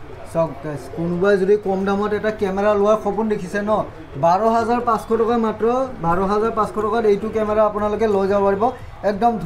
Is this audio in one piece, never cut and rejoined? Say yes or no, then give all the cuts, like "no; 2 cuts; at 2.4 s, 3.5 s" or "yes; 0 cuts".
yes; 0 cuts